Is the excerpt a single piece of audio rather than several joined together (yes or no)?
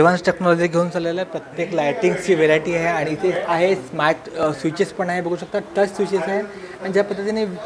yes